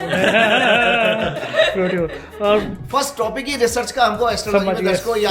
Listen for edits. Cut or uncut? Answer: cut